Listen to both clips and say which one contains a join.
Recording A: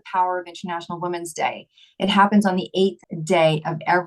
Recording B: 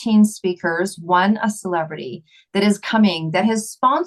A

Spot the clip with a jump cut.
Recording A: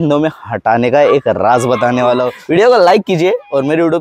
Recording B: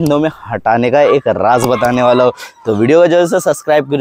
A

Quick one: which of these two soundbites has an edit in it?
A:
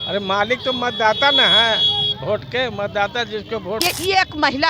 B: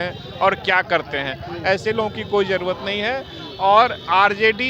A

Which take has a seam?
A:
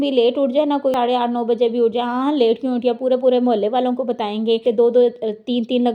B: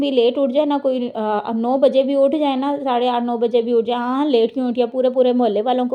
A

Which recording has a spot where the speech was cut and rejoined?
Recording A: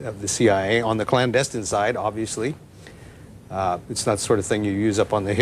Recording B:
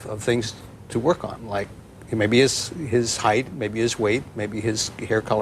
A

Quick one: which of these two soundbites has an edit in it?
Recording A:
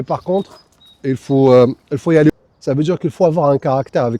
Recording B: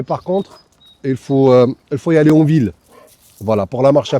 A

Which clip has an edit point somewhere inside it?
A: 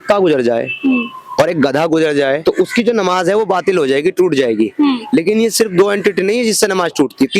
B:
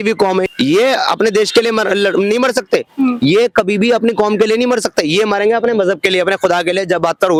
A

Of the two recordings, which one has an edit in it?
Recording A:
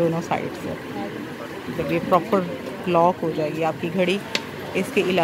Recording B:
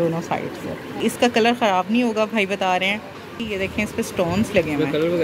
B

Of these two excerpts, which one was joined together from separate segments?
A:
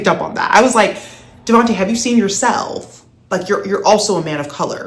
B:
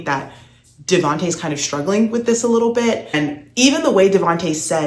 B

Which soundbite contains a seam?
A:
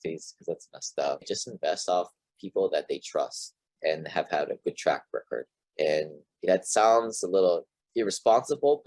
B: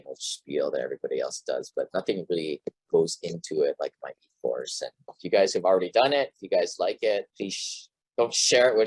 A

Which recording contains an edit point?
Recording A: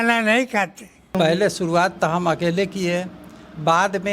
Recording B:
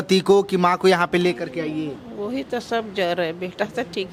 A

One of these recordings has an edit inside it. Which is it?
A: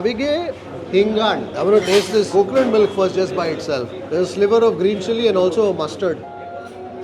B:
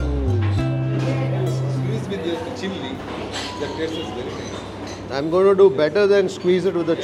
A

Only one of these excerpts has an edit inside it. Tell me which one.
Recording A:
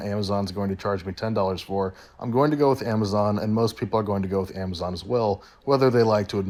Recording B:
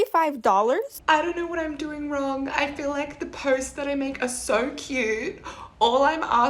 B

